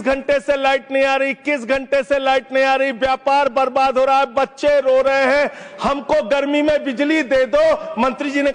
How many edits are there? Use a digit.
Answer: 0